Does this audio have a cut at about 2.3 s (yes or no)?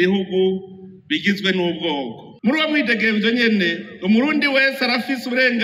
yes